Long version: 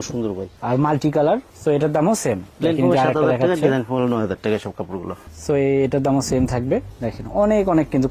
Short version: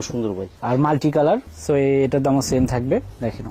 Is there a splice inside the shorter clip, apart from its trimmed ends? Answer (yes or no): yes